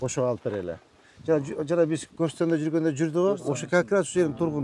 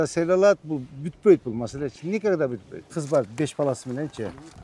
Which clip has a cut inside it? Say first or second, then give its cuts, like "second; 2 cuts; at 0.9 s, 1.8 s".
second; 1 cut; at 2.9 s